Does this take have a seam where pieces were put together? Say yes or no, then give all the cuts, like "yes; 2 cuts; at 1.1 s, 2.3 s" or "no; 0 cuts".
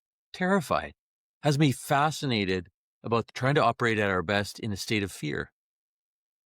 yes; 1 cut; at 3.3 s